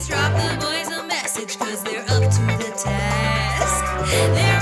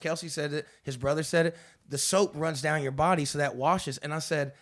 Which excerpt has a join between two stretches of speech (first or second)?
second